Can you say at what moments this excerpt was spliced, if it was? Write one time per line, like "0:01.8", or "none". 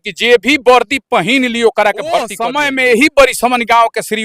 0:02.4